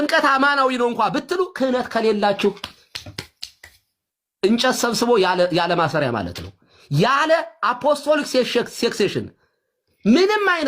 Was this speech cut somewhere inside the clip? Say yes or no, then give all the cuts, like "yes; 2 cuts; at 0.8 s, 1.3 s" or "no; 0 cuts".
yes; 2 cuts; at 1.4 s, 7.4 s